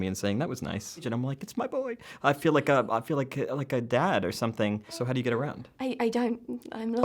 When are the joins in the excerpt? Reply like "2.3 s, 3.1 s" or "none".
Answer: 1.1 s, 5.0 s